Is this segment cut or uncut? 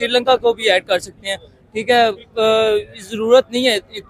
uncut